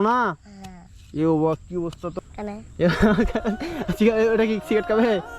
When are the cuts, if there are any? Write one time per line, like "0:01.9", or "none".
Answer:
0:02.3